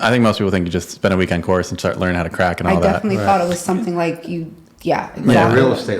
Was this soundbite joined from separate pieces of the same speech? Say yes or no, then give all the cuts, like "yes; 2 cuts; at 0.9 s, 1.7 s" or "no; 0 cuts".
no; 0 cuts